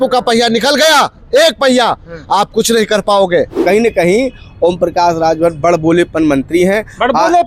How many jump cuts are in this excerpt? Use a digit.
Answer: 1